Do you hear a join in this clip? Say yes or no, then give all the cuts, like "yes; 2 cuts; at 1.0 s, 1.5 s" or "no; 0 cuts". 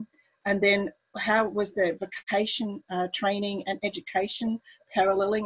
yes; 1 cut; at 2.1 s